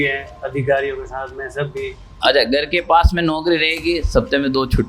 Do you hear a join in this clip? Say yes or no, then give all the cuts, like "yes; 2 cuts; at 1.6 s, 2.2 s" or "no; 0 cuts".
yes; 1 cut; at 2.1 s